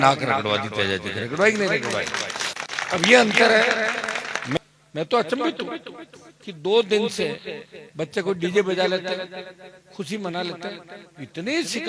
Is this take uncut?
no; 1 cut; at 4.6 s

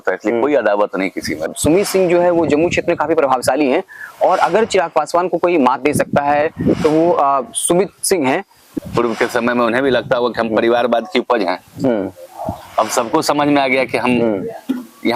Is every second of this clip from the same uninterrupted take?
no; 2 cuts; at 1.5 s, 8.6 s

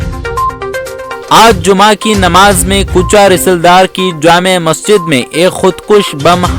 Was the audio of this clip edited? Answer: yes; 1 cut; at 1.3 s

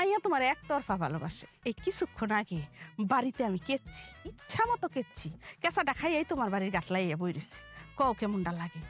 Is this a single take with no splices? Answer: no; 1 cut; at 1.4 s

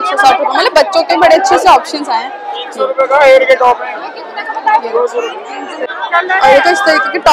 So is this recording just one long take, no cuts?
yes; 0 cuts

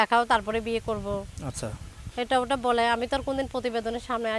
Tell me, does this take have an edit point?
no; 0 cuts

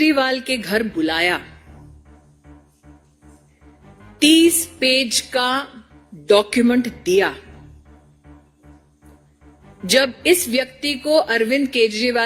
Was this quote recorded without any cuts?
yes; 0 cuts

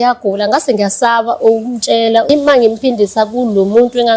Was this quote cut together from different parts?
yes; 1 cut; at 2.3 s

